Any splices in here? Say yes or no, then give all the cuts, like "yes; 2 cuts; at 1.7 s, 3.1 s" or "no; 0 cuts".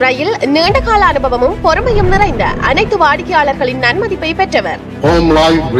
no; 0 cuts